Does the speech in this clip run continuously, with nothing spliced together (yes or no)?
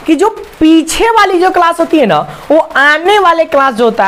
yes